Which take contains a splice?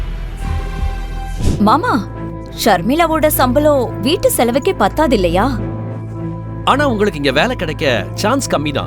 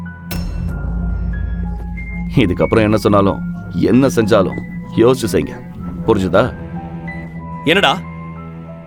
first; 1 cut; at 1.4 s

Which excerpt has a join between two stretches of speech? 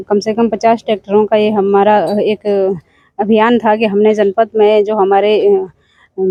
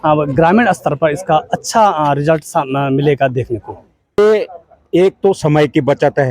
second; 1 cut; at 4.2 s

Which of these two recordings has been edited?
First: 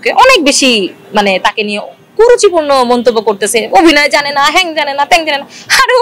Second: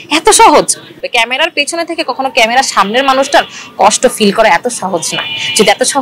second; 1 cut; at 1.0 s

